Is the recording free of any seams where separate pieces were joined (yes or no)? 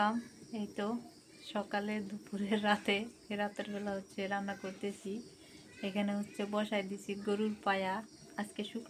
yes